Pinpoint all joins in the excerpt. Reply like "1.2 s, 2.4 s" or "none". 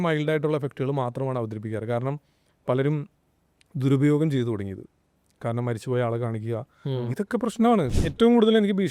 7.9 s